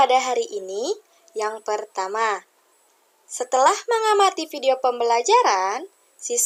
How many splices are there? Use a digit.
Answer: 0